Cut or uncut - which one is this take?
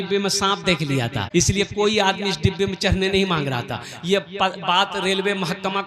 cut